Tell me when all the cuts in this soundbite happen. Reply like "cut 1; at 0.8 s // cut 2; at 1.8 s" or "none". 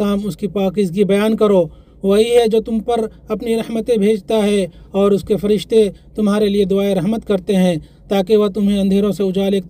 none